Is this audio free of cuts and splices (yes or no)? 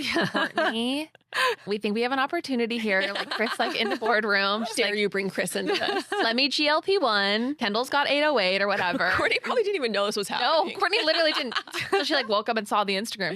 no